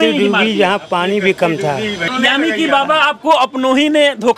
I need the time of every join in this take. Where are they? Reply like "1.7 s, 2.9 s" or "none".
2.1 s